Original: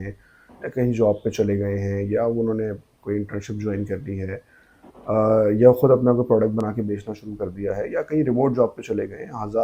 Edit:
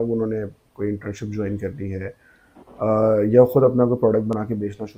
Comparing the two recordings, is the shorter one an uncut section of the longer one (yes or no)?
yes